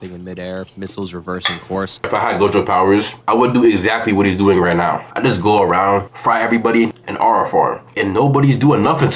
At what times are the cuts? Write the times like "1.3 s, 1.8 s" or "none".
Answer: 2.1 s, 3.2 s, 6.9 s